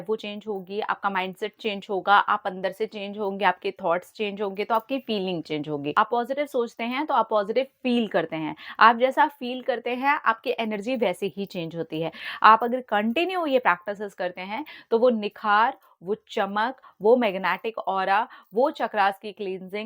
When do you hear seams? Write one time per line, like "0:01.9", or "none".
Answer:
0:05.9
0:12.2